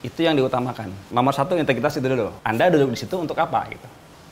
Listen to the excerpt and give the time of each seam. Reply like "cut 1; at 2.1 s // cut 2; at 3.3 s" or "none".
cut 1; at 0.9 s // cut 2; at 2.4 s